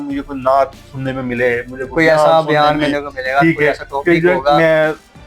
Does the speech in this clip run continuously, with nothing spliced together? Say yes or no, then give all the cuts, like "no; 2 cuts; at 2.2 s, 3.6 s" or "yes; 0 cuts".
yes; 0 cuts